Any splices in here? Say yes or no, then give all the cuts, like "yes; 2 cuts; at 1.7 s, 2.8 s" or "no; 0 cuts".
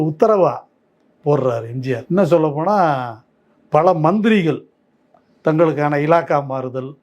yes; 1 cut; at 2.0 s